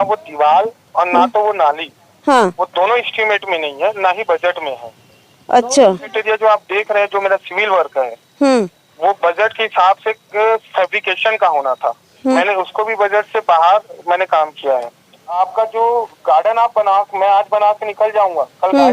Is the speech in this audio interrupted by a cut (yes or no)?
yes